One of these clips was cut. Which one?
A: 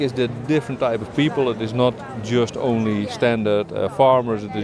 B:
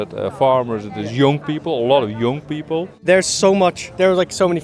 B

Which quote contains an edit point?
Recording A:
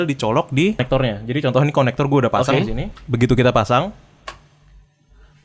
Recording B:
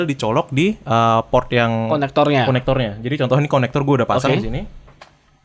A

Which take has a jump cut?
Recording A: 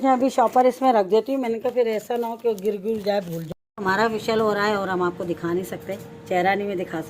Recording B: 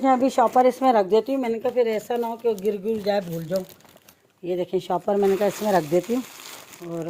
A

